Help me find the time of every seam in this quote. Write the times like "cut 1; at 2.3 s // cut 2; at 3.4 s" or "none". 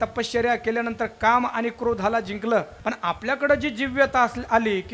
cut 1; at 2.7 s